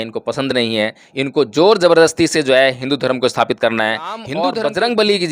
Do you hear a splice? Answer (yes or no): yes